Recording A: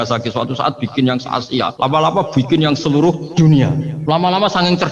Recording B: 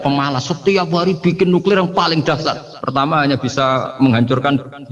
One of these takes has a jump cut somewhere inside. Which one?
A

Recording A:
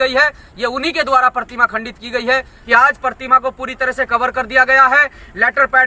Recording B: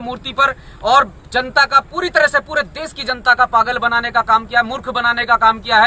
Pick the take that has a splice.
A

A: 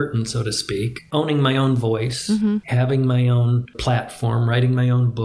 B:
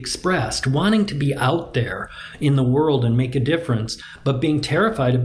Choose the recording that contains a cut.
A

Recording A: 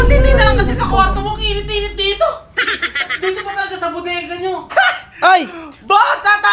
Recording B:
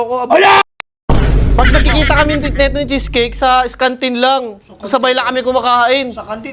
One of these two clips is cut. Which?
A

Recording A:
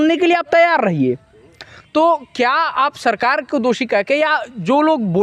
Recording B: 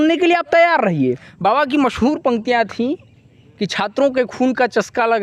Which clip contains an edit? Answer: B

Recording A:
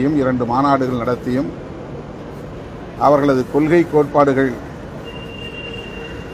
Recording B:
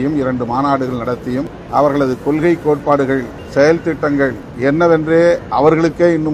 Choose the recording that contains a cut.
B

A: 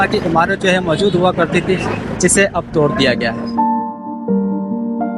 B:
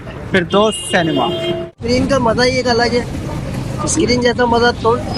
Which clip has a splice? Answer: B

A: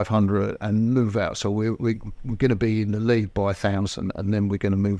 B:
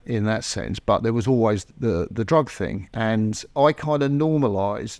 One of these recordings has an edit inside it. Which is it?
B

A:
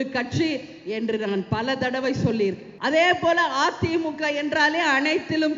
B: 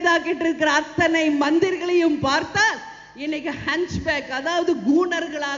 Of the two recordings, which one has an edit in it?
A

